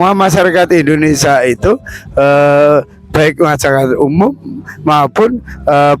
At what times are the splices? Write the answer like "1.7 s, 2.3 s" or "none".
none